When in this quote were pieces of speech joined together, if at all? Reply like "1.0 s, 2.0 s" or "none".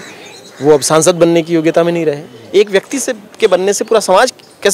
2.3 s

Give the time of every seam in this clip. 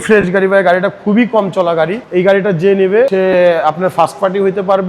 2.0 s, 3.1 s

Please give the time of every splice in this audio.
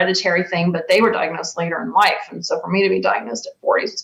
none

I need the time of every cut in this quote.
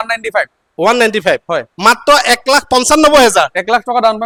none

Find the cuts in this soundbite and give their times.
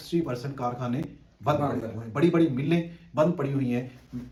none

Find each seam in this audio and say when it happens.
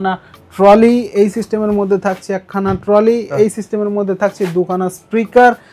none

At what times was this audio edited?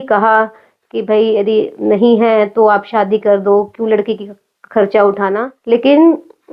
5.5 s

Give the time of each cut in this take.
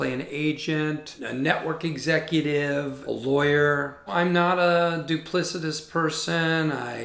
1.1 s

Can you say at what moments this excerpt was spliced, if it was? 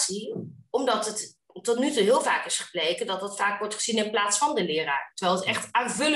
none

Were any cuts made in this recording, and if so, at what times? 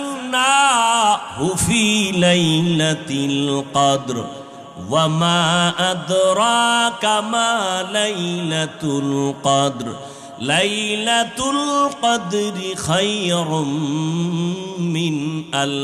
none

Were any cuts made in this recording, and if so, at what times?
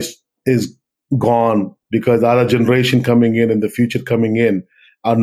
1.8 s

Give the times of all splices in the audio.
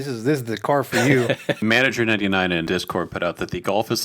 1.6 s, 2.7 s

